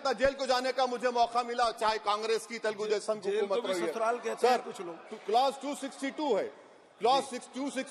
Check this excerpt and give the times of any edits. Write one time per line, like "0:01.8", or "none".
none